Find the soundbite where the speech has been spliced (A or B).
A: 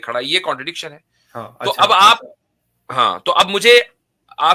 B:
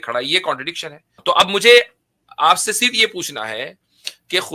B